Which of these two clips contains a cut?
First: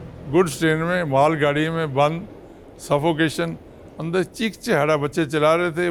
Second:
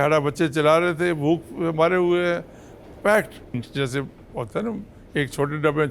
second; 1 cut; at 3.6 s

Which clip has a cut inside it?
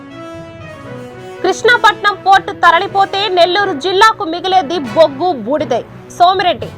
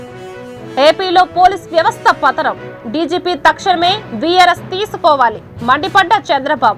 first; 1 cut; at 1.2 s

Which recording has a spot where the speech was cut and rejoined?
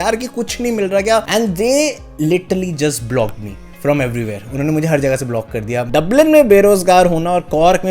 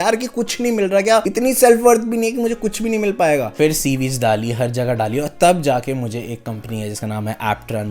first; 2 cuts; at 1.3 s, 5.9 s

